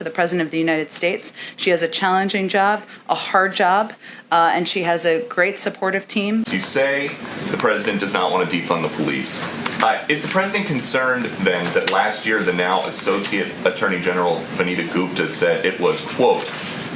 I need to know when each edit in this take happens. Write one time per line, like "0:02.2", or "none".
0:06.5